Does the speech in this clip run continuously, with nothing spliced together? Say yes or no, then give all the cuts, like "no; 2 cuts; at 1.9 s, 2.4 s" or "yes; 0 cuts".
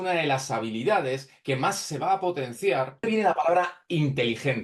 no; 1 cut; at 3.0 s